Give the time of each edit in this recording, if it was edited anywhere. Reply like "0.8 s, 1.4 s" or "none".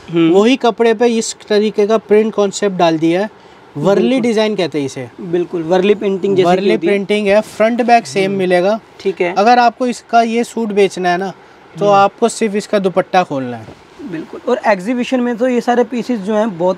none